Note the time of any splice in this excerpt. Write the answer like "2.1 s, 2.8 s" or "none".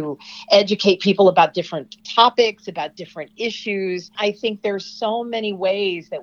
4.1 s